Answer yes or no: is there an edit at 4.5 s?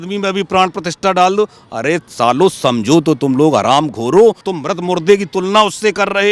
yes